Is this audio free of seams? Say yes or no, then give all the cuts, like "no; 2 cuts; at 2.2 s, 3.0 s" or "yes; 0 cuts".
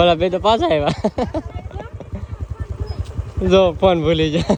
yes; 0 cuts